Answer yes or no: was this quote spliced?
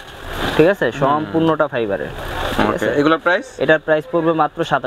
no